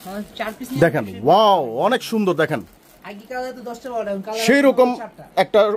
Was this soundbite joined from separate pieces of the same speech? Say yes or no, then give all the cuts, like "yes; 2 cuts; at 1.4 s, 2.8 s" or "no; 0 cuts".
no; 0 cuts